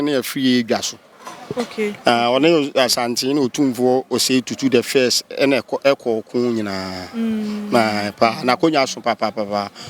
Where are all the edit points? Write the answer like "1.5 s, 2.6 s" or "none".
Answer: none